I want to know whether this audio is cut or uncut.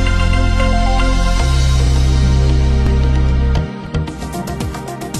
uncut